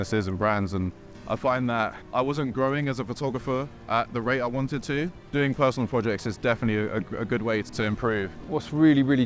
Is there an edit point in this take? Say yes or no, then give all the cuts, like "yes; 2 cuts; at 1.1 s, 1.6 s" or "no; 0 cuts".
yes; 2 cuts; at 5.2 s, 8.4 s